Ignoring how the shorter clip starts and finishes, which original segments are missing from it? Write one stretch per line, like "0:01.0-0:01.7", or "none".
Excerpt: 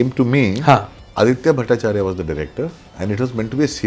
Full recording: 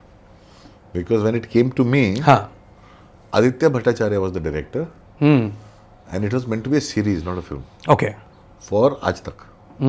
0:02.6-0:03.1
0:05.0-0:06.0